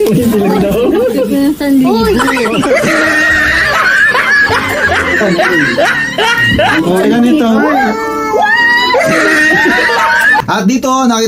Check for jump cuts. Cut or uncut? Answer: uncut